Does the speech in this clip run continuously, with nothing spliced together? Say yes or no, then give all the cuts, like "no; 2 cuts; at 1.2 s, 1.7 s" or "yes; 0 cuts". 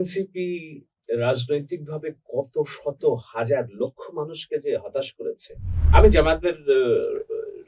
no; 1 cut; at 5.8 s